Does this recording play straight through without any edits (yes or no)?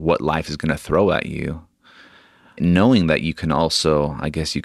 no